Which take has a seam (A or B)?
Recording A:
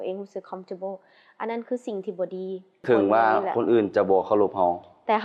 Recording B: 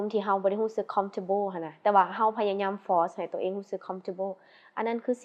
A